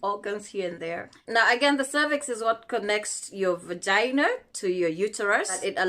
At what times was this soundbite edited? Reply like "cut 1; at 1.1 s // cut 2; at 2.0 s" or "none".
cut 1; at 1.1 s